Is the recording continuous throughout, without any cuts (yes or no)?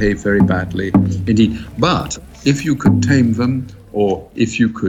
no